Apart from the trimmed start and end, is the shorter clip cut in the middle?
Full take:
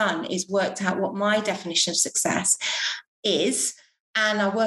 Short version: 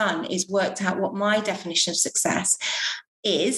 no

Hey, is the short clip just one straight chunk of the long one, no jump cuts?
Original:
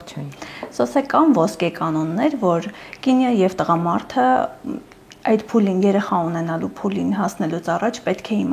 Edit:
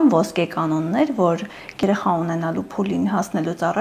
no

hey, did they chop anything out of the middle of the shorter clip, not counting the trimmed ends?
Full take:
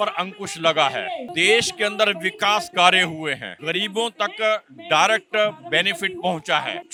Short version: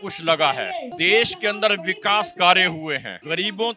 no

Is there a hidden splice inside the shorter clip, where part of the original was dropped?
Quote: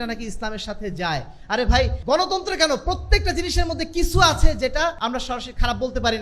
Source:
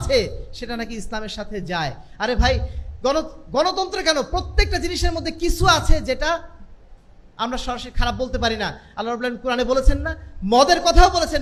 yes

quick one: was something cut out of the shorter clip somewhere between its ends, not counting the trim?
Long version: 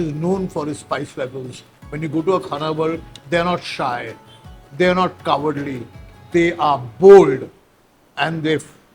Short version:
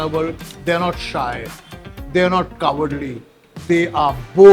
no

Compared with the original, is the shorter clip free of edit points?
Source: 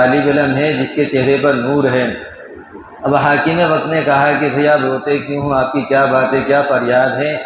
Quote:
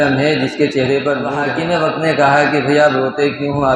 no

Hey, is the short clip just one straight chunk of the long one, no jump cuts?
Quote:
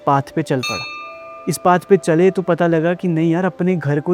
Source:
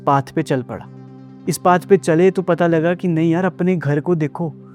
yes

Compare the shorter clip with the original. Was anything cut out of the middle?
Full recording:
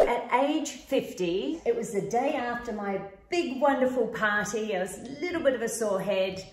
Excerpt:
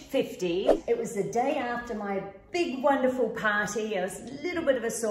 no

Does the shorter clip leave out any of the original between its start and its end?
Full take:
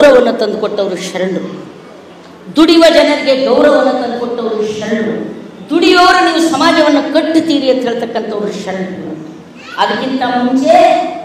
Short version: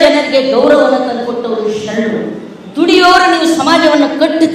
no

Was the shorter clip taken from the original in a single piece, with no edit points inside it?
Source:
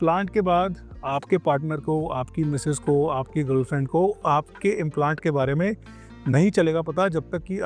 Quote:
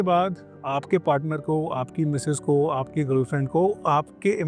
yes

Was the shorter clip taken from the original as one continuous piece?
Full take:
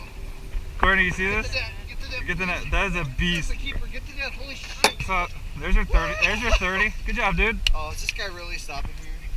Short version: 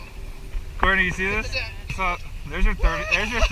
no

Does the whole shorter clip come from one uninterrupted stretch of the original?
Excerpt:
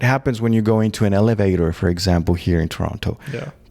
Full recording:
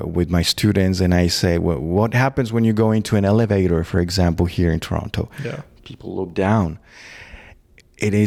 yes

